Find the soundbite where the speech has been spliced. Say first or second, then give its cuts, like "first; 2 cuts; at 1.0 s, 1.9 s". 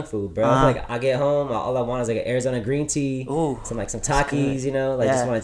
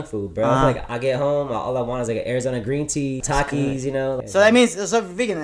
second; 2 cuts; at 3.2 s, 4.2 s